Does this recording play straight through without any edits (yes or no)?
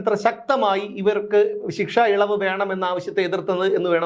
yes